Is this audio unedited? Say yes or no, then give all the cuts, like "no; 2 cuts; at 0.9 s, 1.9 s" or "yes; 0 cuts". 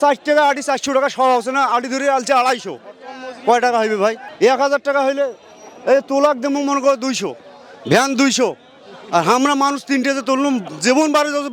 yes; 0 cuts